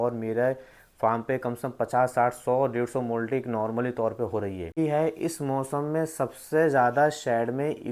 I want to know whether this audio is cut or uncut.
cut